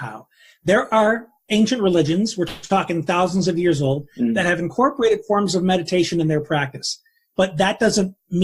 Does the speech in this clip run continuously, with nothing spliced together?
yes; 0 cuts

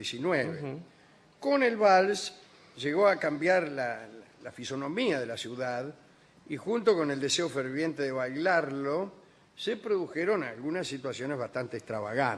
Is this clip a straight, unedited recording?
yes; 0 cuts

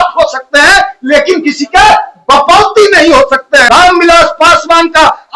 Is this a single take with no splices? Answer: no; 1 cut; at 3.6 s

